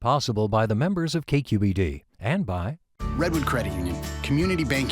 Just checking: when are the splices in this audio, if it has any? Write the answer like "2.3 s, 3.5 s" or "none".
2.8 s